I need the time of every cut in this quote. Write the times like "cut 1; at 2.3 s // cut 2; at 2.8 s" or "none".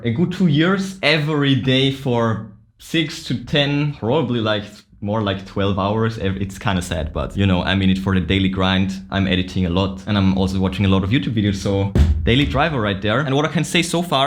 none